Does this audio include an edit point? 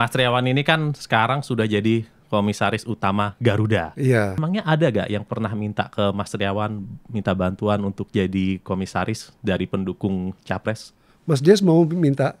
yes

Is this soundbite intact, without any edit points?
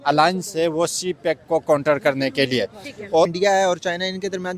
no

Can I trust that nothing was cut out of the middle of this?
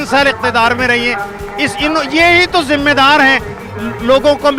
yes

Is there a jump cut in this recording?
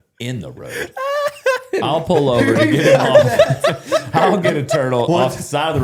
no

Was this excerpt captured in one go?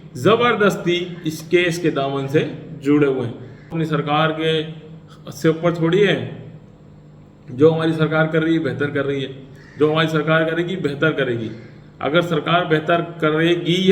no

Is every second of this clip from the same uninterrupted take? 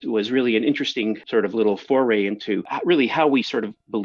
no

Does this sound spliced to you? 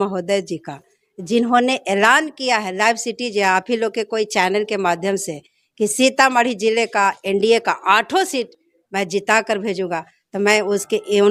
no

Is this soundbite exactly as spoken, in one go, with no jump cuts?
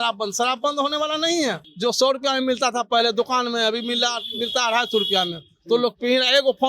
no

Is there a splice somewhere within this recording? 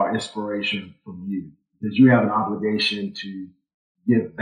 no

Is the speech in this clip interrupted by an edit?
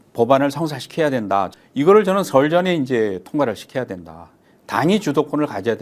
yes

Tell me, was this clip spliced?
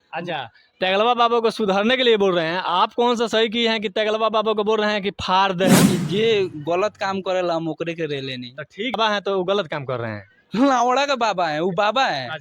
yes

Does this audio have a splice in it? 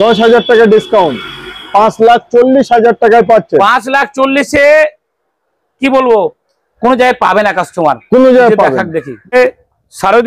yes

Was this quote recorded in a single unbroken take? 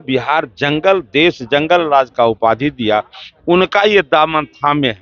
yes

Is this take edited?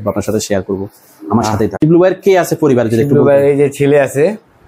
yes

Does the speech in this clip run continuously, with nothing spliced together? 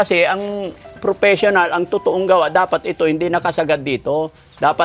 yes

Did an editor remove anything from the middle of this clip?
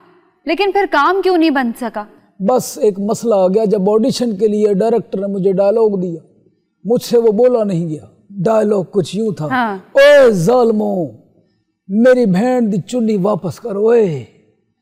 no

